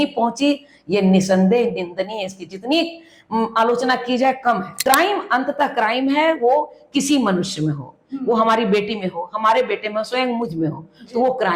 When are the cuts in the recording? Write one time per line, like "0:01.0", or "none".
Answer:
0:04.7